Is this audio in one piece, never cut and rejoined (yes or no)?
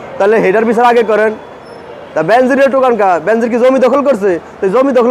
yes